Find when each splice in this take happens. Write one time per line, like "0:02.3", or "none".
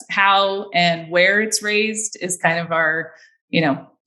none